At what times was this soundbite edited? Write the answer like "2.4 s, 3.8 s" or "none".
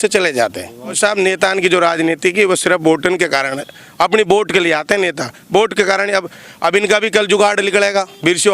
1.0 s